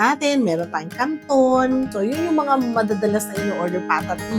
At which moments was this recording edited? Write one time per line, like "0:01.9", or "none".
0:01.9